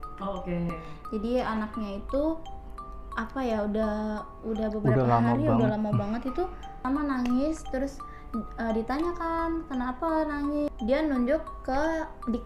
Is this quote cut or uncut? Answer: cut